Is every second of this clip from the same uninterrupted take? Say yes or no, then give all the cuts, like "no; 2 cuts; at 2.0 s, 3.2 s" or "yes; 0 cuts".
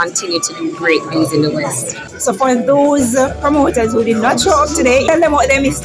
no; 1 cut; at 2.1 s